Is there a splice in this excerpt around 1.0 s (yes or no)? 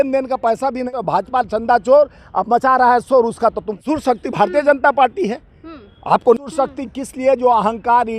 yes